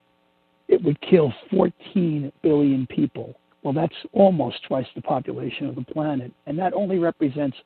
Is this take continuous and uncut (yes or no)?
yes